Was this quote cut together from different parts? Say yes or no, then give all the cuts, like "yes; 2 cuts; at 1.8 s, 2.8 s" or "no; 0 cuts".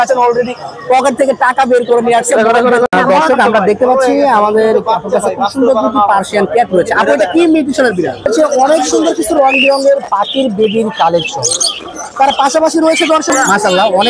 yes; 3 cuts; at 2.9 s, 8.3 s, 13.3 s